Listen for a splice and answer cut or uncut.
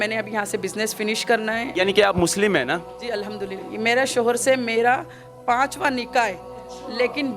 cut